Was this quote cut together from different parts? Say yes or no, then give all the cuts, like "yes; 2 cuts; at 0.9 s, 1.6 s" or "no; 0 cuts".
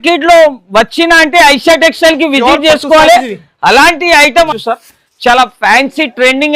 yes; 1 cut; at 4.5 s